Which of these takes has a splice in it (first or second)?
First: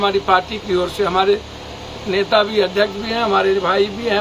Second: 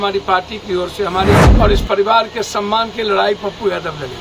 second